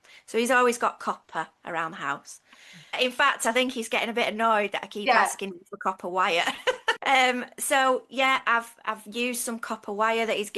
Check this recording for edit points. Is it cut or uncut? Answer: cut